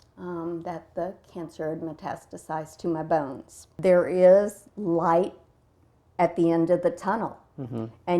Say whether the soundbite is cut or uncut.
cut